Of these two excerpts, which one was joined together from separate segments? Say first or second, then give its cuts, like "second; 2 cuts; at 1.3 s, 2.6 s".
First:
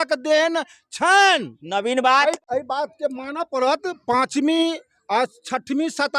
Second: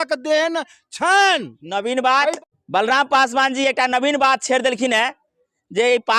first; 1 cut; at 2.5 s